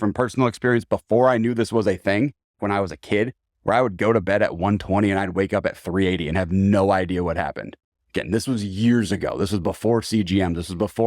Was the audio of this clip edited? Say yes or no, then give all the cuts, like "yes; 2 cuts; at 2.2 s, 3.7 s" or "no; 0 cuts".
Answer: yes; 1 cut; at 2.6 s